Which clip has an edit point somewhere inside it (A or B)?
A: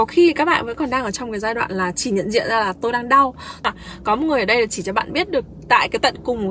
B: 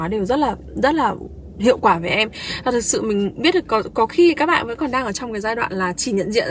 A